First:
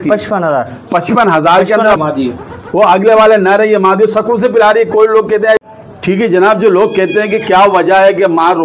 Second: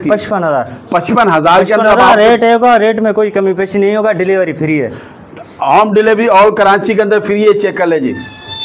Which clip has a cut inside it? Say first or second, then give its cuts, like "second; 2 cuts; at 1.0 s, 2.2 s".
first; 2 cuts; at 2.0 s, 5.6 s